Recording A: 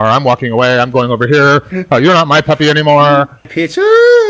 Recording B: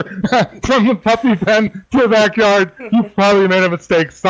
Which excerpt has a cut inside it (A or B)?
A